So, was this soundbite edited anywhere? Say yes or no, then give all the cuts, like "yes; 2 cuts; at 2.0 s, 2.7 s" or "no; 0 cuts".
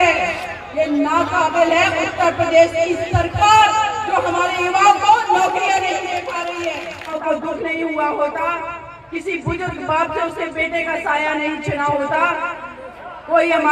yes; 1 cut; at 7.2 s